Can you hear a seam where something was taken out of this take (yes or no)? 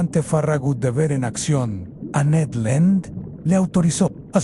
no